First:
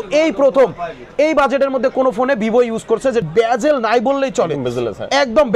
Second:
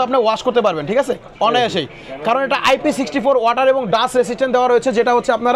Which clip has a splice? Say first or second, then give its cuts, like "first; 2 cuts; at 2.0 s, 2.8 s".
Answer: first; 1 cut; at 3.2 s